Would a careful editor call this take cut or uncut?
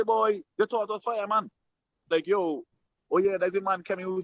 cut